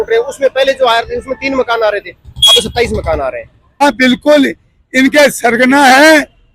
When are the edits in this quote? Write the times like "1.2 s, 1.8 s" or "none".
3.8 s